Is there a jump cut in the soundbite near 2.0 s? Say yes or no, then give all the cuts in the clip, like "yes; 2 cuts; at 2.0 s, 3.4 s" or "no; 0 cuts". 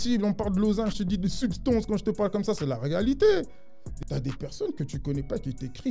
no; 1 cut; at 3.9 s